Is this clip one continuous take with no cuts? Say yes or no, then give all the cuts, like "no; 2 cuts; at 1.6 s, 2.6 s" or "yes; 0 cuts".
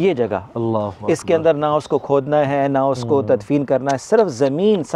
yes; 0 cuts